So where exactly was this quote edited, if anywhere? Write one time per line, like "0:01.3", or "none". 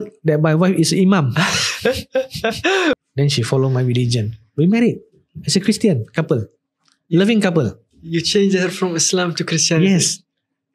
0:03.0

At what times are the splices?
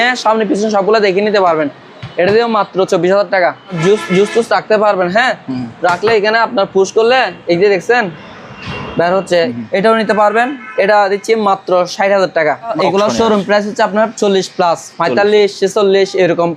0:03.8
0:09.5
0:12.7

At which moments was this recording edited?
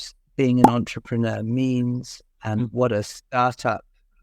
none

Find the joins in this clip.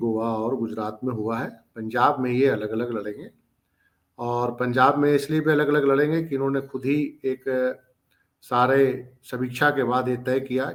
none

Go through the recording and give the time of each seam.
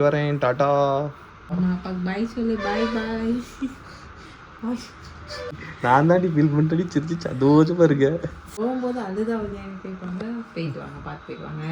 0:01.5
0:05.6
0:08.4

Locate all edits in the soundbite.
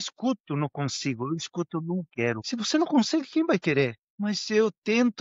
0:02.4
0:04.1

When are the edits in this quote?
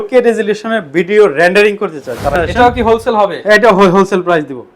0:02.3

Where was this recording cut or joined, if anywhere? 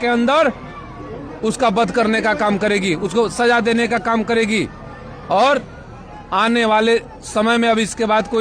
none

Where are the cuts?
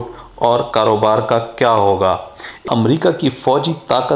0:02.6

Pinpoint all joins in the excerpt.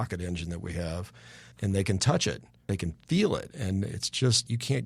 0:01.5
0:02.5

